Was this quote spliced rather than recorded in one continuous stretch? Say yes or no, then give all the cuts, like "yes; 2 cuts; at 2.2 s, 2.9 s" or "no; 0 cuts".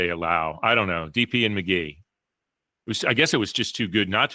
no; 0 cuts